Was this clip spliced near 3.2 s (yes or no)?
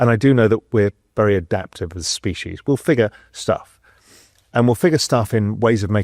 no